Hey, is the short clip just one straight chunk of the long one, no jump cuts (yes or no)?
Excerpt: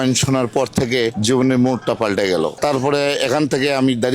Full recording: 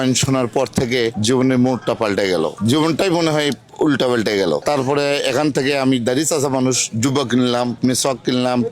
no